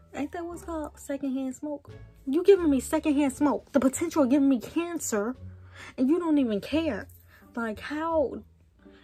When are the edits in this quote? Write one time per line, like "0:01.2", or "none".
none